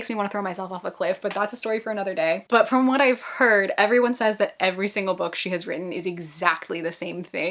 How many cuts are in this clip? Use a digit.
0